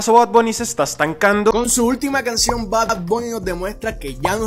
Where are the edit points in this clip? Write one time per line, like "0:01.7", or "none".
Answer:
none